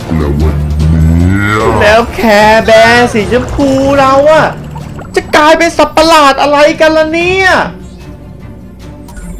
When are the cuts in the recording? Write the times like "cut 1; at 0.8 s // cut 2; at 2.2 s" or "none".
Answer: none

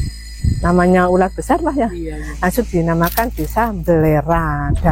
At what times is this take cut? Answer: none

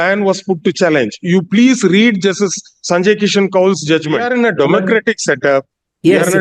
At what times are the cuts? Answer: cut 1; at 4.3 s

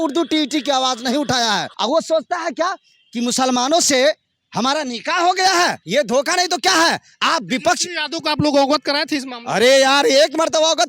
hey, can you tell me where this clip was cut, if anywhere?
cut 1; at 1.7 s // cut 2; at 5.8 s

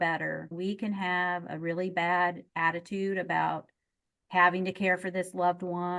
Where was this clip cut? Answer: none

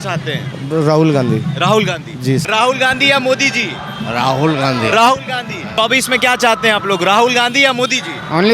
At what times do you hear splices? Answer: cut 1; at 2.5 s // cut 2; at 5.8 s

